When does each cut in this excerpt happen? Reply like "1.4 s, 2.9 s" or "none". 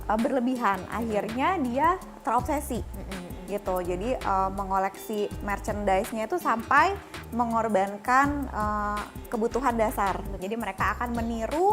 10.4 s